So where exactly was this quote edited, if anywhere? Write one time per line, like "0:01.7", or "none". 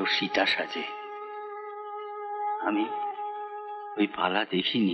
none

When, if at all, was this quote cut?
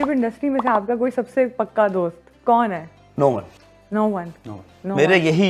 none

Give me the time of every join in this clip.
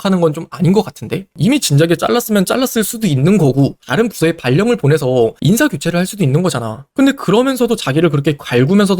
0:01.3

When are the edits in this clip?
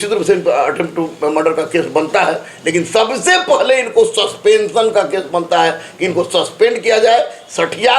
none

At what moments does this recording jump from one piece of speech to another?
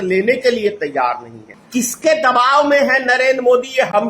none

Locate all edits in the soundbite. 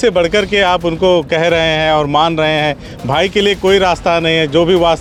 none

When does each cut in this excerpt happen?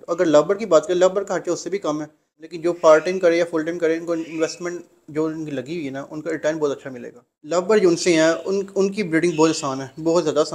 0:02.4
0:07.5

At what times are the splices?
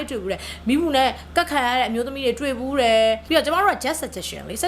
0:03.2

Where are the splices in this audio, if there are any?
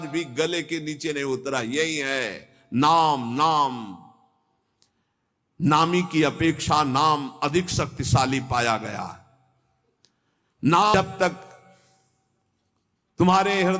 0:10.9

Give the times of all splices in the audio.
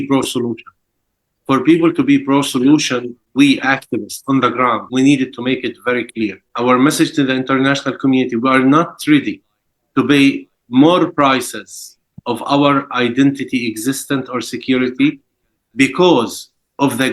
0:03.2
0:04.8
0:06.5

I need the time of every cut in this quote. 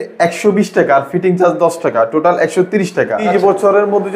0:03.2

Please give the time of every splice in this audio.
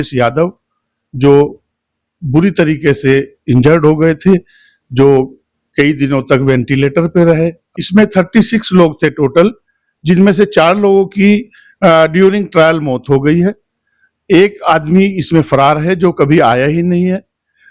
0:07.7

